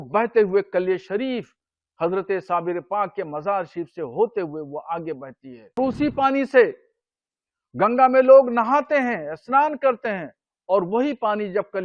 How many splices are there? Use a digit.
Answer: 1